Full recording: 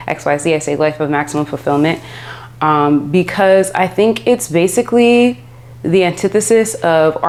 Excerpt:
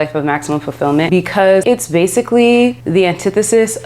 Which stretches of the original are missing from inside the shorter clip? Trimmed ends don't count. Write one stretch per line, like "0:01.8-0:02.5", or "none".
0:02.4-0:04.2
0:05.4-0:05.8